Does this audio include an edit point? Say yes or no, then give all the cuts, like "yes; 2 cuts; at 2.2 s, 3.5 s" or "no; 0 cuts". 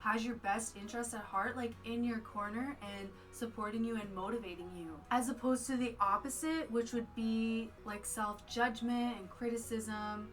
no; 0 cuts